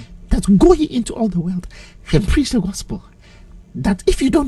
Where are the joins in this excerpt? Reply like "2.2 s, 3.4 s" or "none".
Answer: none